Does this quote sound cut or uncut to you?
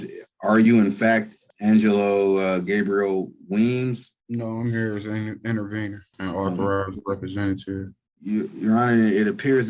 uncut